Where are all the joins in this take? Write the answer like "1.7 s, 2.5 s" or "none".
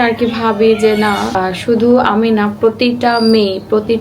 1.4 s